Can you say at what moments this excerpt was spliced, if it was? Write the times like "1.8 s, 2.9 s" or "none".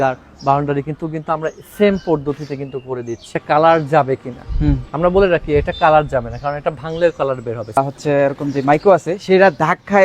3.4 s, 7.8 s